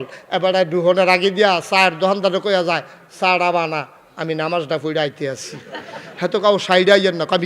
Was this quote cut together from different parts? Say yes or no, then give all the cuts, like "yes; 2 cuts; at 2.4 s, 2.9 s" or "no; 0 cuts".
no; 0 cuts